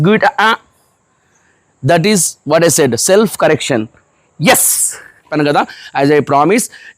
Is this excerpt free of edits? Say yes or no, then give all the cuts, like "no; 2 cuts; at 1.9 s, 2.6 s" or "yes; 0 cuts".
no; 1 cut; at 5.2 s